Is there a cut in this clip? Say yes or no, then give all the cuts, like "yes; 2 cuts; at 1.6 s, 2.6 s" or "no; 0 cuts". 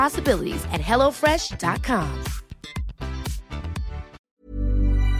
yes; 1 cut; at 4.2 s